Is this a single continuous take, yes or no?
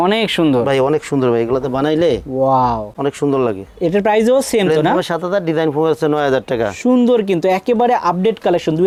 yes